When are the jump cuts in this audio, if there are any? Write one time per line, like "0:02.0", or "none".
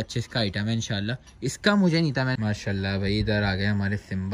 0:02.3